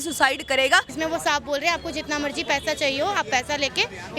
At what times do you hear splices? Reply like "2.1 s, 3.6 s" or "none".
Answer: 0.9 s